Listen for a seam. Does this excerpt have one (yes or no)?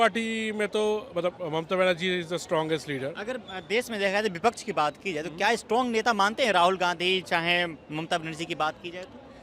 no